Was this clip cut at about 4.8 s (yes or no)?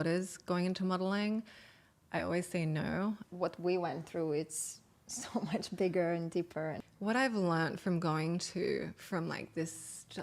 no